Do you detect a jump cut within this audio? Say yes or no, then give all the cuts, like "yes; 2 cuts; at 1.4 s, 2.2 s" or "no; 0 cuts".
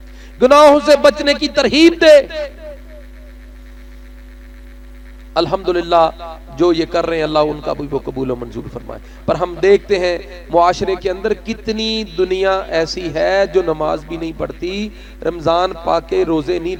no; 0 cuts